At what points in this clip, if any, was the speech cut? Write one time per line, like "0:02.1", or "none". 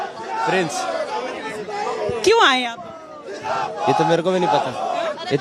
none